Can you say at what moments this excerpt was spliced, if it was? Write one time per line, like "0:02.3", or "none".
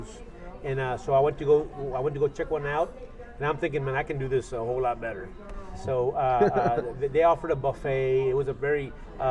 none